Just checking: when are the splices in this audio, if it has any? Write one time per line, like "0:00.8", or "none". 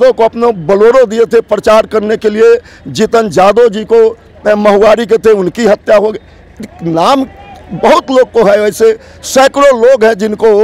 none